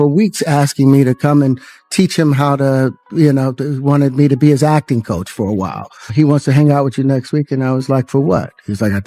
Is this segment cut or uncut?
cut